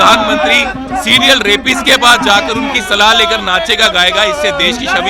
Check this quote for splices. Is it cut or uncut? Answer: uncut